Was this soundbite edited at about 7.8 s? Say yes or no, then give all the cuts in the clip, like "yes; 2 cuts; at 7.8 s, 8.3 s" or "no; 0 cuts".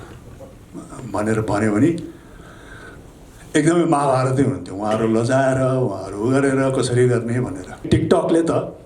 yes; 1 cut; at 7.8 s